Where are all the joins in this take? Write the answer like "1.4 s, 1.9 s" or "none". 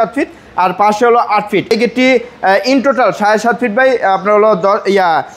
1.7 s